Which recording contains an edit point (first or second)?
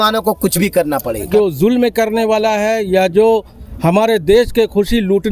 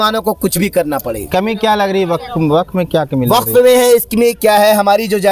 first